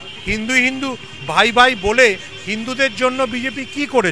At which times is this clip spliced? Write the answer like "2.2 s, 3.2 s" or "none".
none